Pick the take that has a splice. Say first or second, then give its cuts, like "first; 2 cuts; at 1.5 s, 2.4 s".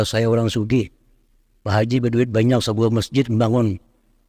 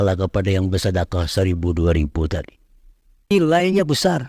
second; 1 cut; at 3.3 s